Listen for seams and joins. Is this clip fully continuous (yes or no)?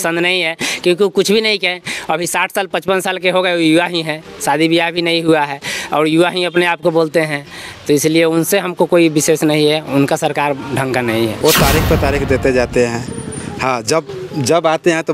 no